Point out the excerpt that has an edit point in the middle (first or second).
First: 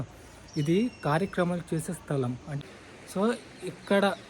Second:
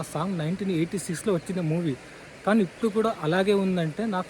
first